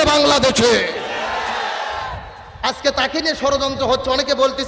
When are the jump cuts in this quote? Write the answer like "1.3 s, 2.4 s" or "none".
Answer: none